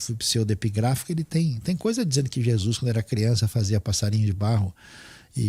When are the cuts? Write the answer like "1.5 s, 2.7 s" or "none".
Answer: none